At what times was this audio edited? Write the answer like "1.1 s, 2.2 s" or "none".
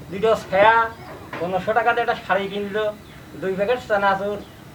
none